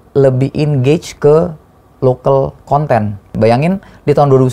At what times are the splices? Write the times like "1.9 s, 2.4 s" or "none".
3.3 s